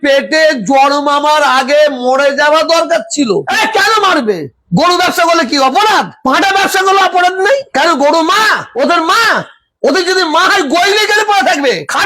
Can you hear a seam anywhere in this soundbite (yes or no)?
yes